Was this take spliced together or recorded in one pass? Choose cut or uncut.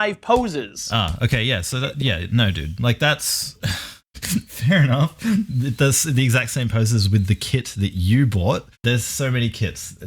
cut